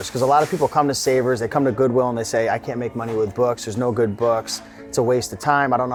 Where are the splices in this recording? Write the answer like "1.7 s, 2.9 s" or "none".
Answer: none